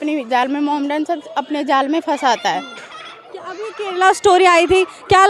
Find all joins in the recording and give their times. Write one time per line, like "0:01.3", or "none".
none